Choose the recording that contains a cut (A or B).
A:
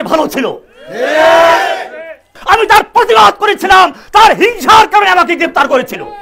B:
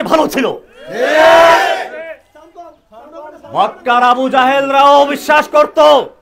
A